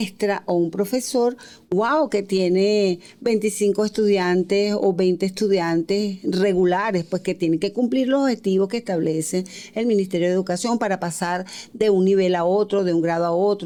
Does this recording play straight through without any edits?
yes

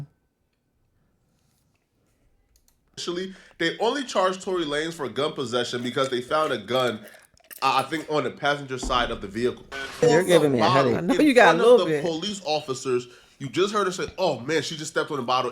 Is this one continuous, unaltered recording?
no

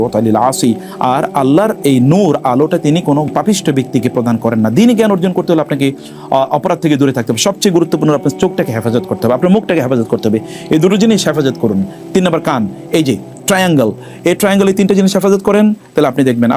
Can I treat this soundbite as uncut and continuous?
no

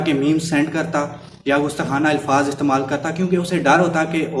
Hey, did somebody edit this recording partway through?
no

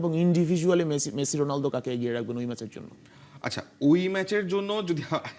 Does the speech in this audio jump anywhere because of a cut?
no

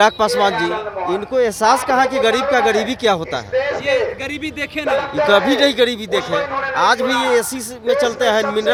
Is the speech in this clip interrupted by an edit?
no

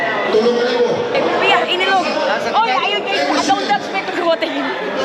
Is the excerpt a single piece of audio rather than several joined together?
no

